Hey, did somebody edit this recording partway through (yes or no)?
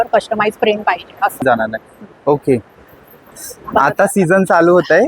yes